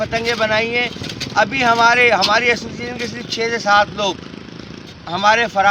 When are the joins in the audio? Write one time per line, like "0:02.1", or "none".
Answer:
none